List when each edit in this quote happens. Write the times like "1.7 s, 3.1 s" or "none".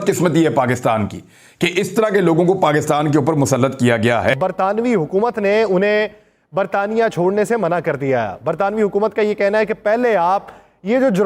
4.4 s